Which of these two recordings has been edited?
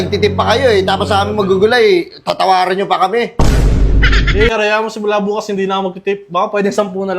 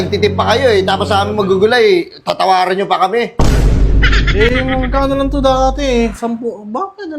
first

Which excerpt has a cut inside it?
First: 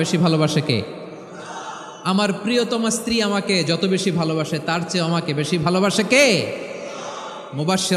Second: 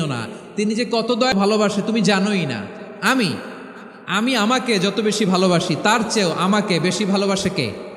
second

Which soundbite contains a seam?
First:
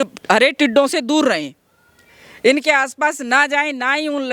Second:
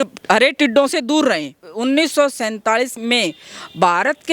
second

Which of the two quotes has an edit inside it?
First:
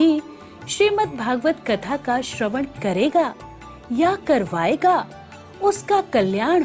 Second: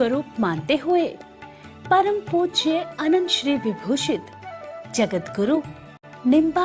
second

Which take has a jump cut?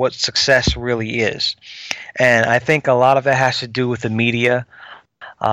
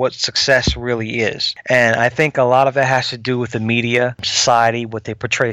second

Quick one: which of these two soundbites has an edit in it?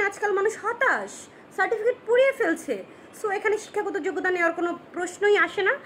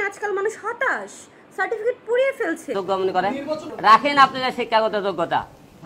second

